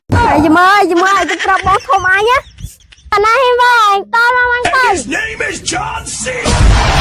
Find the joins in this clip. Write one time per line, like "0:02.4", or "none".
0:03.1